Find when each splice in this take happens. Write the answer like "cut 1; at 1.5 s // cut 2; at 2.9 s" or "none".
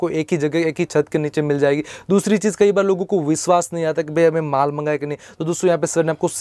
none